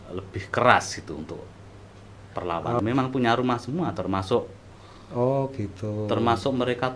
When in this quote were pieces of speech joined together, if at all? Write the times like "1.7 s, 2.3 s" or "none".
2.8 s